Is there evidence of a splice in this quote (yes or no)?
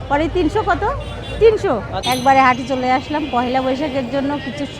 yes